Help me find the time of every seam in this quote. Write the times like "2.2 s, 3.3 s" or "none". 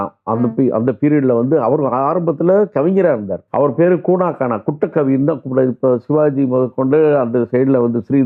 3.4 s

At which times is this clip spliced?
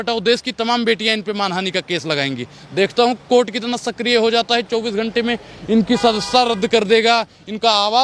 none

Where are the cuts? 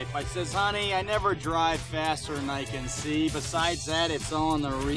none

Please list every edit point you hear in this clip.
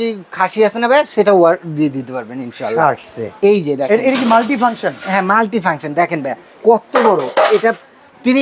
none

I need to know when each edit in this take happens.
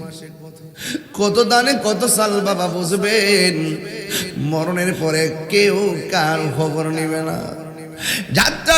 none

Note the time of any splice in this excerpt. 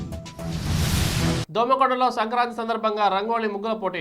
1.5 s

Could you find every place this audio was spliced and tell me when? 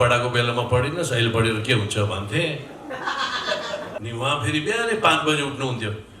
3.9 s

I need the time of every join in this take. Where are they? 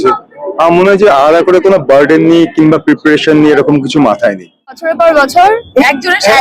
4.8 s

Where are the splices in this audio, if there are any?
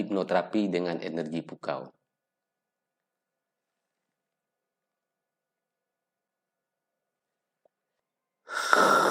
7.9 s

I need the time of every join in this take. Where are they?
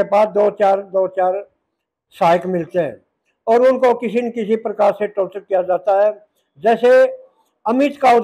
none

